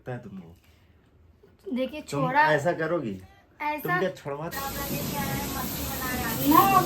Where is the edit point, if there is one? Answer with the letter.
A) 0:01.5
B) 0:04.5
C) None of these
B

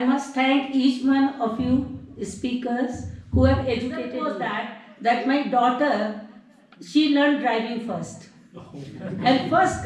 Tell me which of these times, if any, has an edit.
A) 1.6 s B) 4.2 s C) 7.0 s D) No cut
B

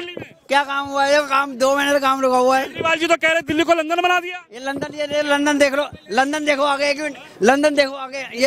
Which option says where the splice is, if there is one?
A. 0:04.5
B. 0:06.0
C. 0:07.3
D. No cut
D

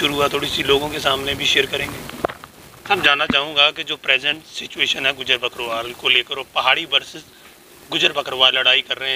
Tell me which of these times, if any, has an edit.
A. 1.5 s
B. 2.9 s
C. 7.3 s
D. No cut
B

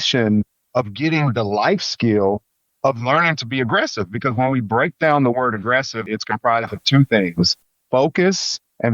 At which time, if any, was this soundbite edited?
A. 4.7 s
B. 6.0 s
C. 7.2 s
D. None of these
B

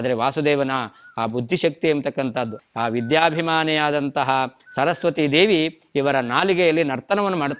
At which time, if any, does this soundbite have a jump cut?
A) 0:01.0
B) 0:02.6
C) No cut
B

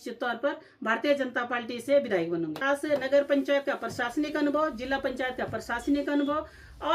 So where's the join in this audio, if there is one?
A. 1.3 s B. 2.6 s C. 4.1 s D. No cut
B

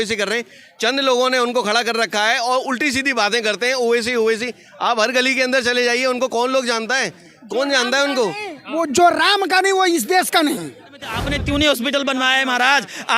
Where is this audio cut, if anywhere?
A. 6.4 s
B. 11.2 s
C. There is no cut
B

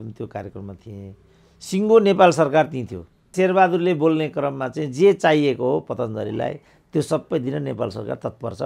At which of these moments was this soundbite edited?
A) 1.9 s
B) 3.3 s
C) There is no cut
B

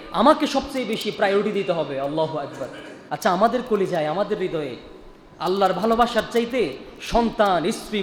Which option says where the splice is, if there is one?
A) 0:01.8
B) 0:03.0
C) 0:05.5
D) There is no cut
D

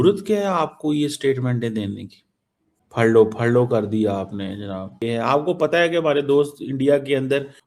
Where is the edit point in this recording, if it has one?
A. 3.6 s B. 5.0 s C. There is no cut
B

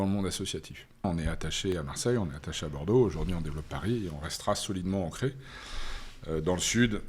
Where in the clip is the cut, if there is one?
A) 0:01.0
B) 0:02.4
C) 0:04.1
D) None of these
A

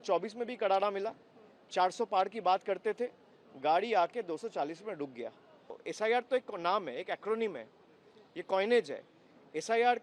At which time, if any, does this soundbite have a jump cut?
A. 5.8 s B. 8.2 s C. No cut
A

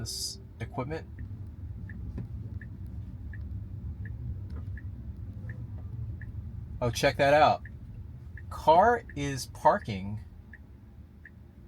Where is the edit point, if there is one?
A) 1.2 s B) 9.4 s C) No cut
A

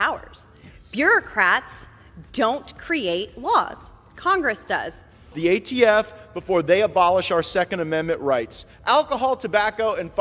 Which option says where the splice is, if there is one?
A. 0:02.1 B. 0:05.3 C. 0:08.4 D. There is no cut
B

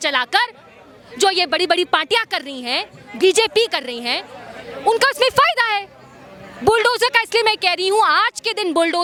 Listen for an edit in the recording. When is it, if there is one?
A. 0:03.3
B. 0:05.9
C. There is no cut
C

